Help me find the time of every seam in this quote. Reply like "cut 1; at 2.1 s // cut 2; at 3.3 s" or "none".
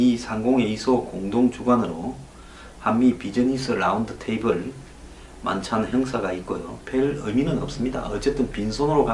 cut 1; at 7.4 s